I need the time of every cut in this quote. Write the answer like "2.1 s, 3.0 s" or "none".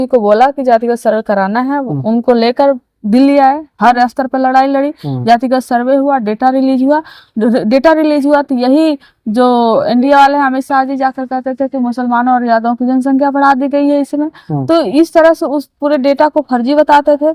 none